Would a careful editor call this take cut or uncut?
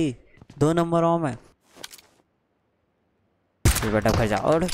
cut